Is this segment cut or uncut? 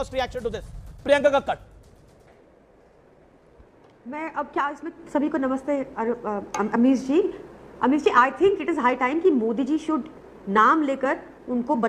uncut